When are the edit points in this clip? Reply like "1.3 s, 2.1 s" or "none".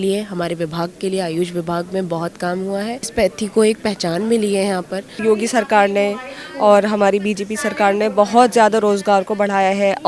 3.1 s, 5.0 s